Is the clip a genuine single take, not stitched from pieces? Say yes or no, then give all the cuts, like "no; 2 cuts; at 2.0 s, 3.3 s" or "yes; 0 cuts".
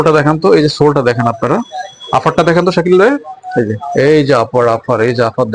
yes; 0 cuts